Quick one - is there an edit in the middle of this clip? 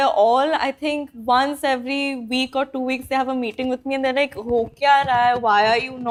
no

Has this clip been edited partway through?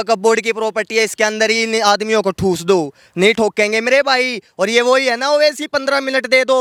no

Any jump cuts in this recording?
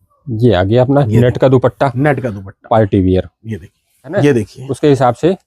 yes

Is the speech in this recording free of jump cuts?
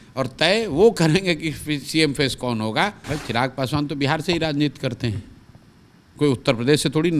no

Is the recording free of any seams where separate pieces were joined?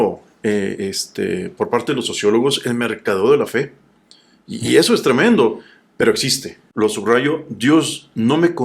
no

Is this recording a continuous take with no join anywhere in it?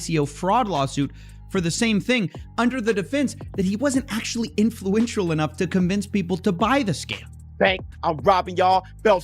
no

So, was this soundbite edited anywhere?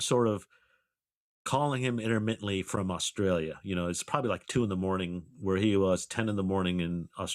no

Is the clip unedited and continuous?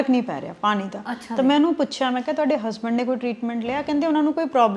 yes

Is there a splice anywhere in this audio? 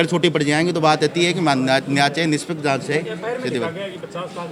no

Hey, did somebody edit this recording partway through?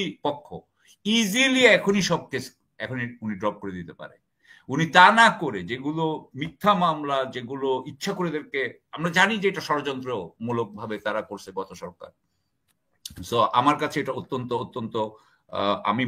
no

